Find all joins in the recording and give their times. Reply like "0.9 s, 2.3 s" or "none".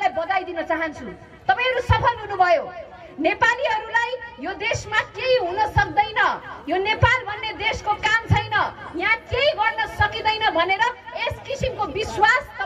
none